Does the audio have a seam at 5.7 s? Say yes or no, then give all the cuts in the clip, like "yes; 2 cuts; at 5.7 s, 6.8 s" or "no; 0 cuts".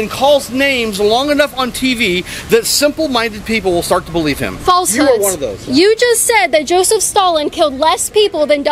no; 0 cuts